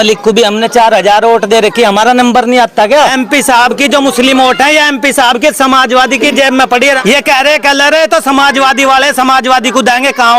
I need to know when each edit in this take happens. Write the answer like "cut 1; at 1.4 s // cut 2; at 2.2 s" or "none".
cut 1; at 3.1 s // cut 2; at 7.0 s